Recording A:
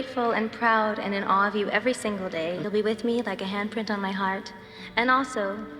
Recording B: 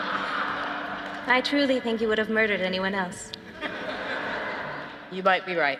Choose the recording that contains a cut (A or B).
A